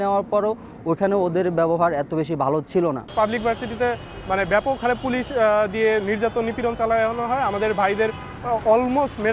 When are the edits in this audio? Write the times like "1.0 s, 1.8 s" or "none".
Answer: 3.1 s